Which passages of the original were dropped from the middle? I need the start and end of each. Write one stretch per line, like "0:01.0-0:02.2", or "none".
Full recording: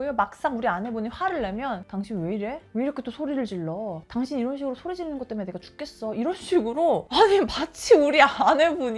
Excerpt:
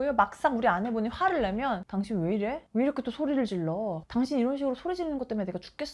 none